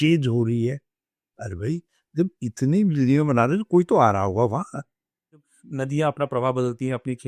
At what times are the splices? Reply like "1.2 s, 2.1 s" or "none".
5.6 s